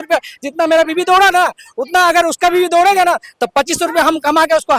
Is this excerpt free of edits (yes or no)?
yes